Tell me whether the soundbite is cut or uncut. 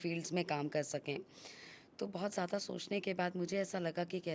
uncut